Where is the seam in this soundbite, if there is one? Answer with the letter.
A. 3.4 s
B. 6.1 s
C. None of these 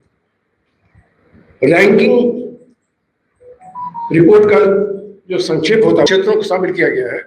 B